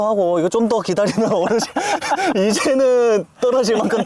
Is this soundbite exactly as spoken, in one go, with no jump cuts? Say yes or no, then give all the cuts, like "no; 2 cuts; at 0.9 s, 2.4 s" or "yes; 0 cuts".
yes; 0 cuts